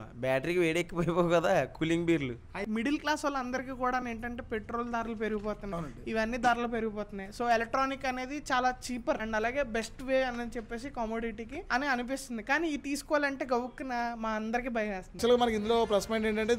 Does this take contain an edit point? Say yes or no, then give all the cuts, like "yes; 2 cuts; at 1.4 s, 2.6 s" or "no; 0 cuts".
yes; 2 cuts; at 2.6 s, 15.2 s